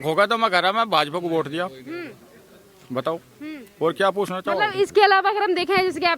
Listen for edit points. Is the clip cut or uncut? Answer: uncut